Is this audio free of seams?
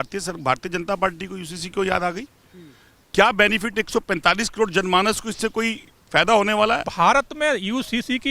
no; 1 cut; at 6.9 s

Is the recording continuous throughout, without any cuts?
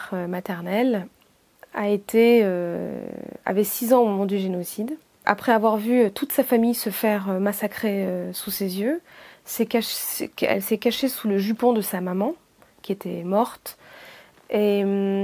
no; 1 cut; at 5.2 s

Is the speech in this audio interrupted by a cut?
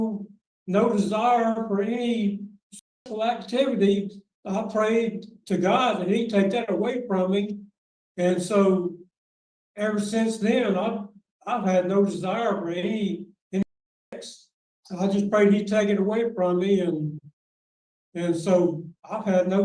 no; 0 cuts

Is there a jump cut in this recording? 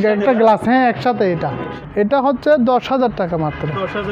yes; 1 cut; at 1.7 s

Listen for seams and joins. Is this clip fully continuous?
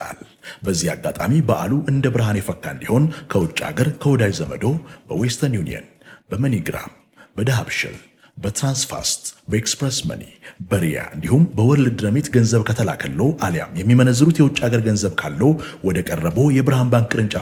yes; 0 cuts

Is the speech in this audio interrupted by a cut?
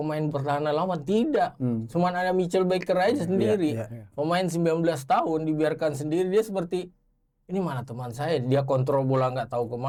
no; 0 cuts

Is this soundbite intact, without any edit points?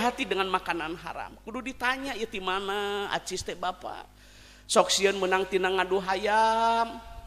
yes; 0 cuts

